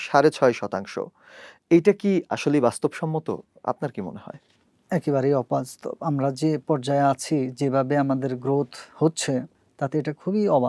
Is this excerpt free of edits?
no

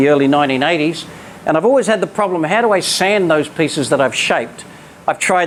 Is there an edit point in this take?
no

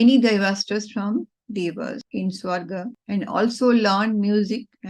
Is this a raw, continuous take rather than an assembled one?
no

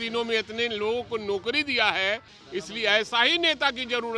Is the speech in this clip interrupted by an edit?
yes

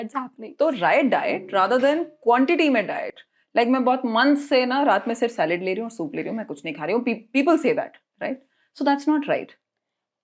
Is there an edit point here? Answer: no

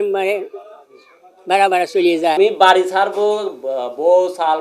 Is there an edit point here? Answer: yes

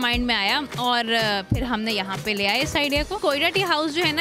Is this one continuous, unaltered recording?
no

